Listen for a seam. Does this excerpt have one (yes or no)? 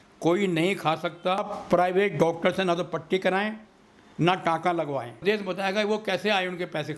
yes